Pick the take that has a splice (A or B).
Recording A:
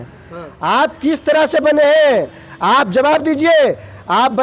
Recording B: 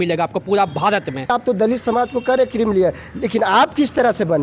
B